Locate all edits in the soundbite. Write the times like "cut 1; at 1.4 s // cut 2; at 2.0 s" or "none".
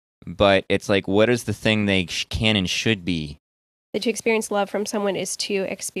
cut 1; at 3.8 s